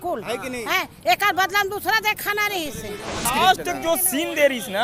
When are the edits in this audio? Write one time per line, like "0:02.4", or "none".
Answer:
0:03.2